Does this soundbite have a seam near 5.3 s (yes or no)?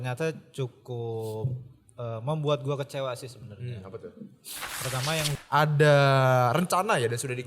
yes